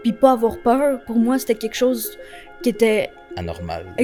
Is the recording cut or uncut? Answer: uncut